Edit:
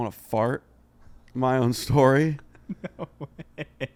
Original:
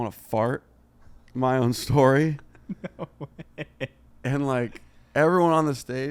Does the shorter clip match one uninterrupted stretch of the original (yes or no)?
yes